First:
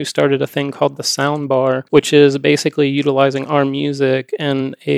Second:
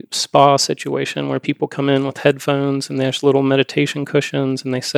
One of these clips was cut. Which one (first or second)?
first